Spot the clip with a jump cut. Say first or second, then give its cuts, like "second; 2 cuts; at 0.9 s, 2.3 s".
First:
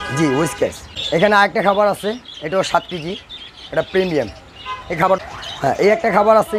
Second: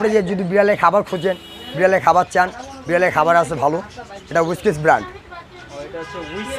first; 2 cuts; at 1.0 s, 5.2 s